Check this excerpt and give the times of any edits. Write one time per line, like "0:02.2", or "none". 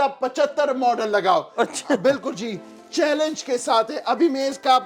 none